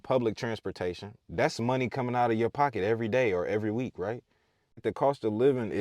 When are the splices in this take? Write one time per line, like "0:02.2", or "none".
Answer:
0:04.8